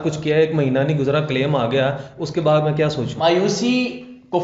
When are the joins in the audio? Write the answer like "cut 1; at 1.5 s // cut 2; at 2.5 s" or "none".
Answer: cut 1; at 3.1 s